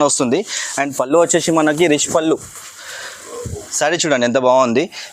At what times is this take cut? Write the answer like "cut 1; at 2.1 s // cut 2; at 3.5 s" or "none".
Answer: cut 1; at 3.6 s